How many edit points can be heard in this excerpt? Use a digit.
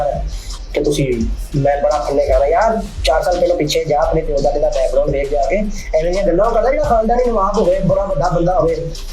0